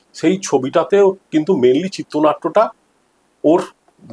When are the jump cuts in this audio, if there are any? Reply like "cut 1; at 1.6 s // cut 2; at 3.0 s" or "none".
none